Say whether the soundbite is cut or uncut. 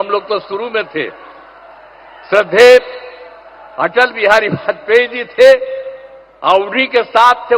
uncut